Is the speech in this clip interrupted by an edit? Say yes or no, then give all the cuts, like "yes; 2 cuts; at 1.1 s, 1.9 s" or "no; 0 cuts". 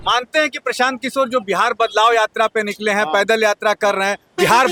no; 0 cuts